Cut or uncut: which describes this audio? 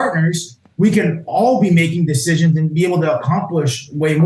uncut